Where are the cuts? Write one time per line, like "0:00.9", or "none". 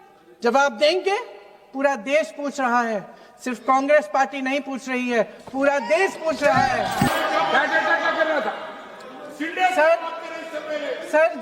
0:07.1